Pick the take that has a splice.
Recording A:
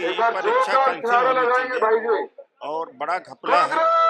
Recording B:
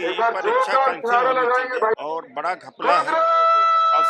B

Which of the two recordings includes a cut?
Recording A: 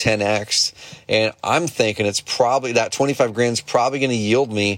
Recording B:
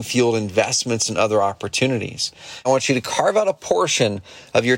B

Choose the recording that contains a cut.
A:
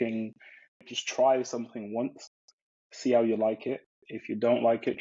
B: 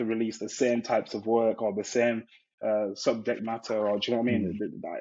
A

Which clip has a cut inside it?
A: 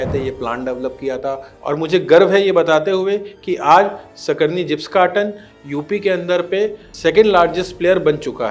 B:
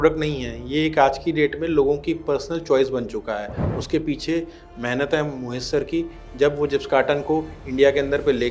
A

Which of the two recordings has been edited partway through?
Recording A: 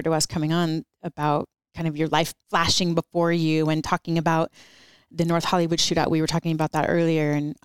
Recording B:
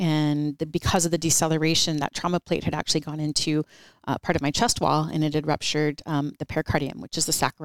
A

